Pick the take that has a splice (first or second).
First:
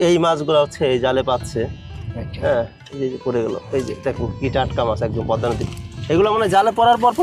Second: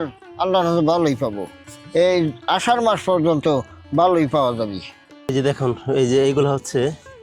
second